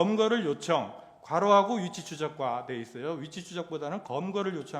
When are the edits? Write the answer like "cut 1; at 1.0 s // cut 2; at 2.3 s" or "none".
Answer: none